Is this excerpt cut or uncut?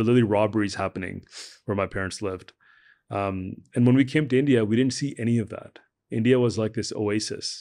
uncut